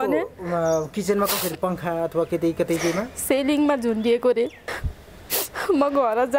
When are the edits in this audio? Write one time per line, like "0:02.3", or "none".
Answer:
0:04.6

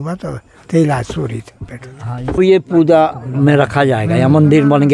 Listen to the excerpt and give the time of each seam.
0:02.4

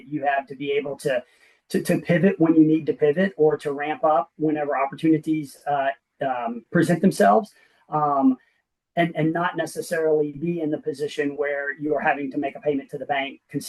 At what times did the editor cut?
none

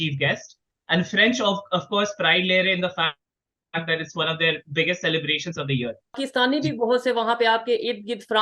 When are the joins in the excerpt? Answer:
0:06.2

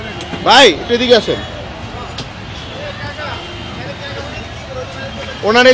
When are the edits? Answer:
none

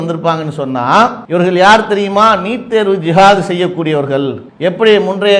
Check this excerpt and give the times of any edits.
0:01.2

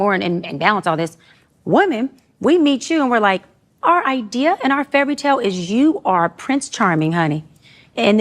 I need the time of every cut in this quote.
0:02.2

